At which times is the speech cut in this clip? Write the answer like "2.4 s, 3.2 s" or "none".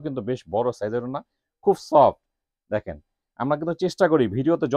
none